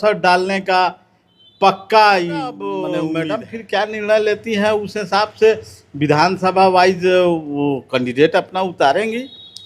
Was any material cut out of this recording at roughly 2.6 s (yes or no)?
yes